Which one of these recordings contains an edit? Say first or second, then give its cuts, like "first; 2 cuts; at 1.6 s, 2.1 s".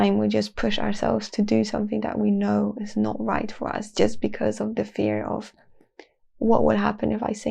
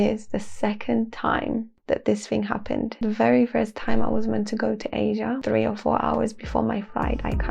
second; 3 cuts; at 1.7 s, 2.9 s, 5.4 s